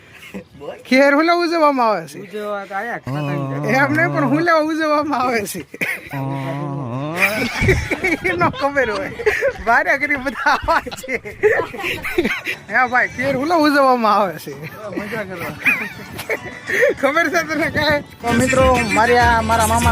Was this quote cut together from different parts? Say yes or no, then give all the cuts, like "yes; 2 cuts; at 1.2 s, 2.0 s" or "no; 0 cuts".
yes; 2 cuts; at 12.4 s, 18.2 s